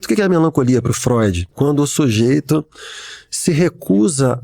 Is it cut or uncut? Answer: cut